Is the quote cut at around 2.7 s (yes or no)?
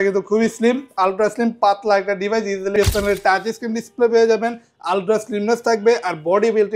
yes